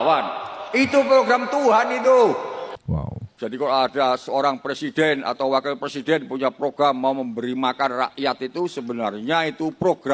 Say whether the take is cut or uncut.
uncut